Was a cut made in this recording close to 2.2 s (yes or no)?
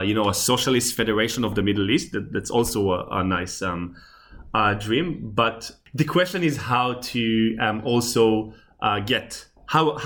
no